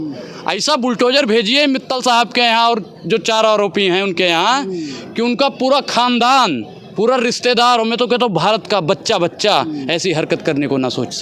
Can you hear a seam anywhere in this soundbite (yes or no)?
no